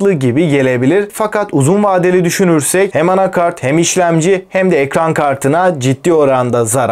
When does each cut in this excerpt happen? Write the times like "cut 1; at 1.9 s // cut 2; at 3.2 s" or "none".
cut 1; at 2.9 s